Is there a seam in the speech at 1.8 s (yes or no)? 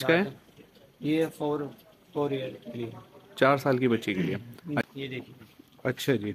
no